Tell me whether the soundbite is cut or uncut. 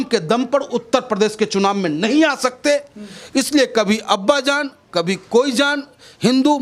uncut